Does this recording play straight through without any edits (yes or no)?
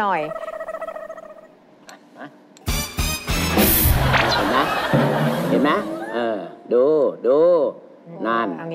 yes